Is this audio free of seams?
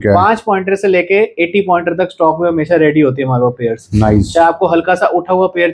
yes; 0 cuts

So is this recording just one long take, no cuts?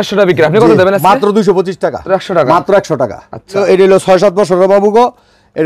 no; 2 cuts; at 2.0 s, 3.6 s

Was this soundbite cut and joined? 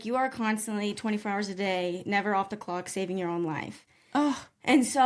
no; 0 cuts

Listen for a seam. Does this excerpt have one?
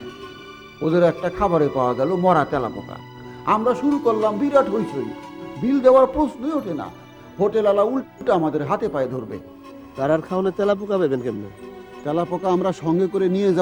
no; 0 cuts

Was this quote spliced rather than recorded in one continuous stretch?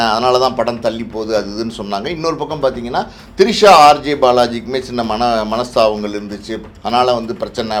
no; 0 cuts

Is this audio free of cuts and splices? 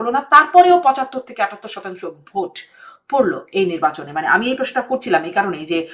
yes; 0 cuts

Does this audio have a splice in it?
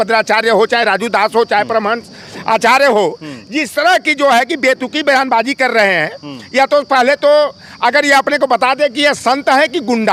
no; 0 cuts

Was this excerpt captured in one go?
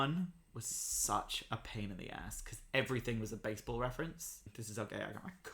no; 1 cut; at 4.6 s

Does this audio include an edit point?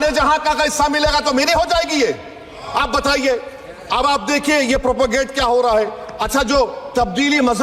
no; 0 cuts

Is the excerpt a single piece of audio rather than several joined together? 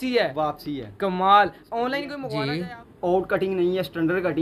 no; 1 cut; at 2.2 s

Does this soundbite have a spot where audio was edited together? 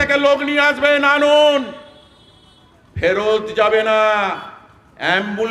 no; 0 cuts

